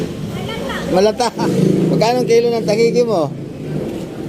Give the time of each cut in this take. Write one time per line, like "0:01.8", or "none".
0:01.4